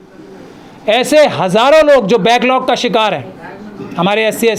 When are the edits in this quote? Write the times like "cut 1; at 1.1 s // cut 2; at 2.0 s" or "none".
none